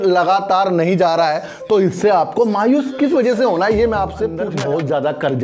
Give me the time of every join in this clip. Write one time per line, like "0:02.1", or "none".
0:04.4